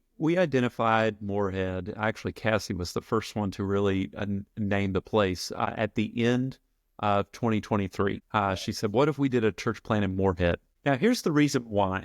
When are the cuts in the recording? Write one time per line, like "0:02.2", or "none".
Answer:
0:05.7
0:08.2
0:10.7